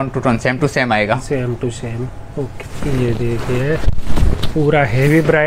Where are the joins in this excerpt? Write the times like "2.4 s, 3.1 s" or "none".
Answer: 2.5 s

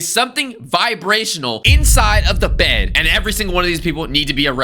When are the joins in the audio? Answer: 2.9 s

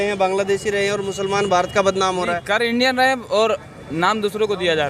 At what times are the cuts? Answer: none

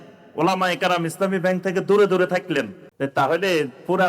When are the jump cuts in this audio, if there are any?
2.8 s

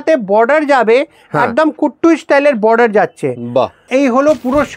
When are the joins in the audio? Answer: 3.8 s

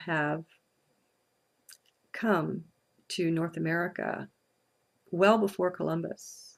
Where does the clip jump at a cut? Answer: none

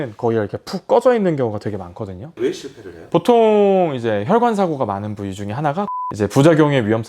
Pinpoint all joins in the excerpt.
2.2 s, 6.0 s

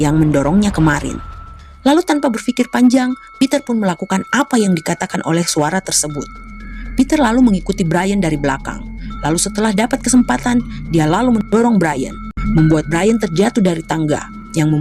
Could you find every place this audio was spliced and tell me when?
none

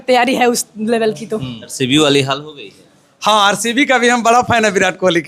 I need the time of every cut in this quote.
1.6 s

